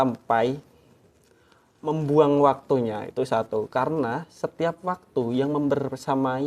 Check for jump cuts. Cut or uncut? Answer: uncut